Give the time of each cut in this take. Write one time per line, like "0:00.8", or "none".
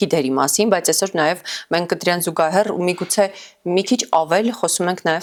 none